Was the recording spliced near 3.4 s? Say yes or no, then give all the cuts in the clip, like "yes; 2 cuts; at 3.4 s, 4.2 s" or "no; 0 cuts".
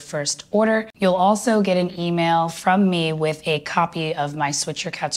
no; 1 cut; at 0.9 s